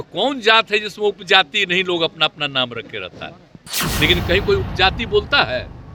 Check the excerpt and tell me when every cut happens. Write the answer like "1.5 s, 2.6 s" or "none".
none